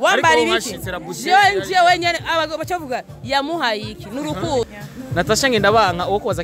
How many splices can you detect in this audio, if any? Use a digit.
1